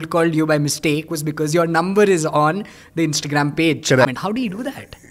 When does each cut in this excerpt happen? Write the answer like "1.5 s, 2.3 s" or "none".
4.1 s

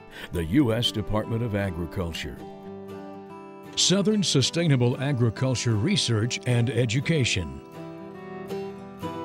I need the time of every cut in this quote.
7.5 s

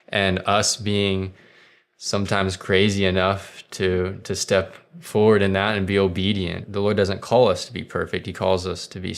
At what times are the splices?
6.6 s

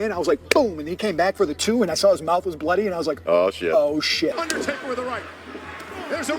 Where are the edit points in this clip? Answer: 4.3 s

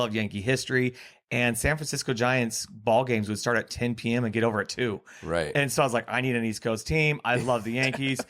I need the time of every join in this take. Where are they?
none

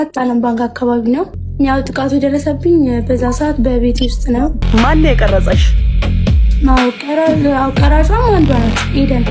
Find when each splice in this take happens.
1.4 s, 4.6 s

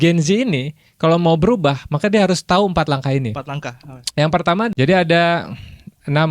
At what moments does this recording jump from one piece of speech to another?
4.7 s

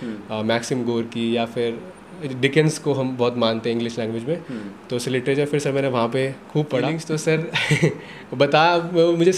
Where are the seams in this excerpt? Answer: 7.0 s

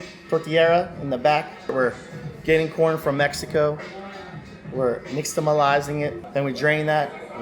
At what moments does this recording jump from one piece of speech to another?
1.7 s, 6.2 s

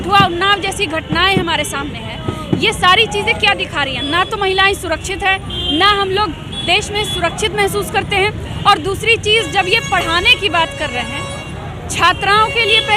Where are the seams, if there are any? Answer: none

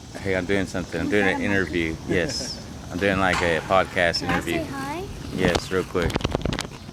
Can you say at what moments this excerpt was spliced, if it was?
none

